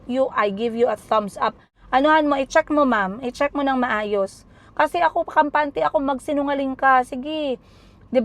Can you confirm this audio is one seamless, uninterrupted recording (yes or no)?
no